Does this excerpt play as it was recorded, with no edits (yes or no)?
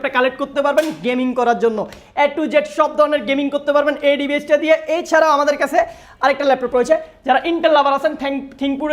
yes